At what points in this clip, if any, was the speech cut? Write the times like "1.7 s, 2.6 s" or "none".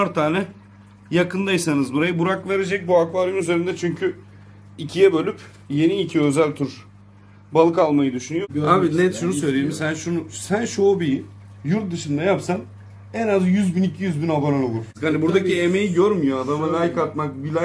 8.5 s, 14.9 s